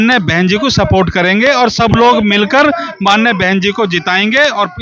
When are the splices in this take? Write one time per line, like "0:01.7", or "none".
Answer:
none

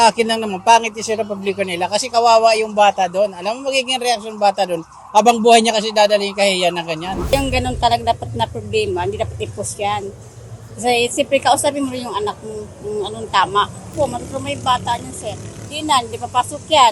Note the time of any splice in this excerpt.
0:07.1

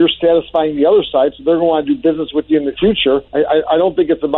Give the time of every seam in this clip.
0:03.3

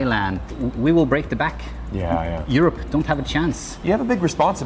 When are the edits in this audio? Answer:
0:03.7

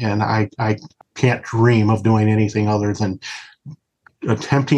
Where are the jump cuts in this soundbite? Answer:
0:00.9

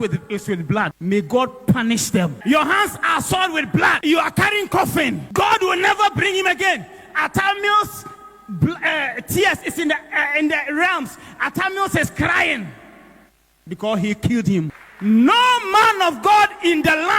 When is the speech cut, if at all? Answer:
0:01.0
0:02.4
0:04.0
0:05.2
0:14.8

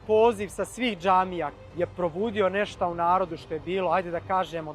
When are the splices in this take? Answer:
0:01.5

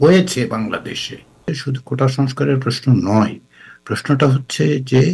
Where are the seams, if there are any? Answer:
0:01.5

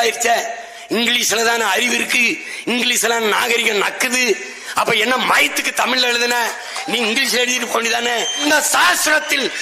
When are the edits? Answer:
0:08.4

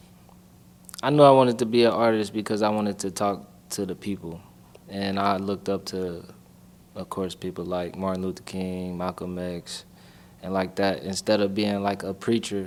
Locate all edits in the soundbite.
none

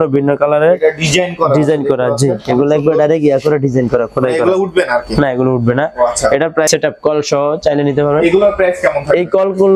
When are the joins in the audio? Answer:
0:06.7

